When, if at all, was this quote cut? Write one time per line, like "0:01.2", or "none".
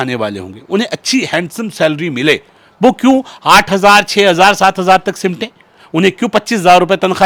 none